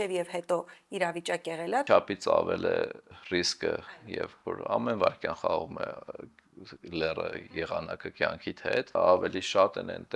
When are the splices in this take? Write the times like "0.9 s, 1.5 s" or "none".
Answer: 1.9 s, 3.1 s, 8.9 s